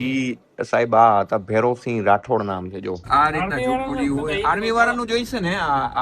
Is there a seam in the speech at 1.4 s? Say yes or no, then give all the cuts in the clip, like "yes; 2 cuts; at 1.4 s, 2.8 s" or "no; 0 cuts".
no; 1 cut; at 3.0 s